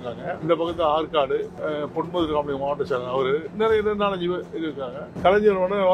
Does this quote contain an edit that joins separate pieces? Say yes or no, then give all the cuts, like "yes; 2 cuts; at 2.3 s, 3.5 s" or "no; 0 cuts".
yes; 1 cut; at 3.5 s